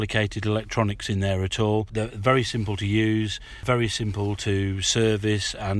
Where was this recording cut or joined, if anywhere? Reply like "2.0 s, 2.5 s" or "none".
1.9 s, 3.6 s

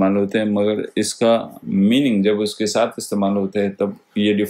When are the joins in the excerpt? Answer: none

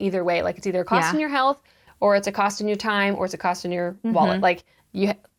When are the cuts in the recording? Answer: none

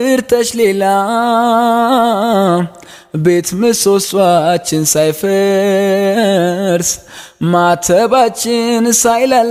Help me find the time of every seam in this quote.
none

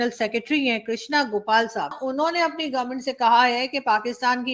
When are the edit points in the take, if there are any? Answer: 2.0 s

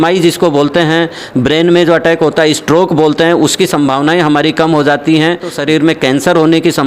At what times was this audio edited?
5.5 s

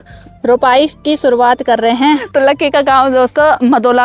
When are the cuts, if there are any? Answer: 2.3 s

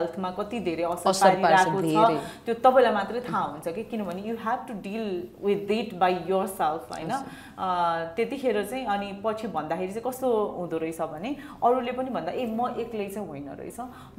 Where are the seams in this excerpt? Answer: none

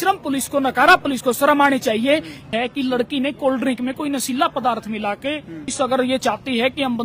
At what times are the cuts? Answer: 2.5 s, 5.7 s

